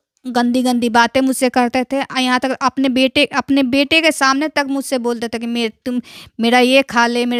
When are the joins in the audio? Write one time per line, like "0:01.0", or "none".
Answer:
none